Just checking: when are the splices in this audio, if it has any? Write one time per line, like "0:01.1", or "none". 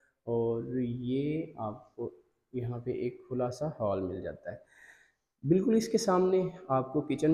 none